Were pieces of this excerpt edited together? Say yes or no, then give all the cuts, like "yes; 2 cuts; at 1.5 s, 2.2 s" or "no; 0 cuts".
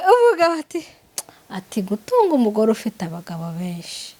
no; 0 cuts